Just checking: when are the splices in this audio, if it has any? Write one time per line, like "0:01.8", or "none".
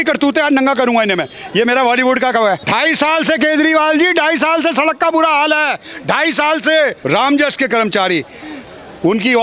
0:02.6
0:07.0